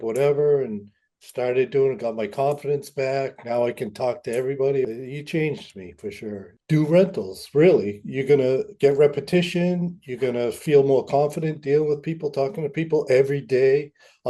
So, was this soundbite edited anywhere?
yes; 2 cuts; at 4.9 s, 6.5 s

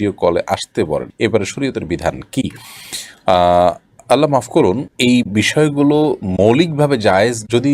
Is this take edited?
no; 0 cuts

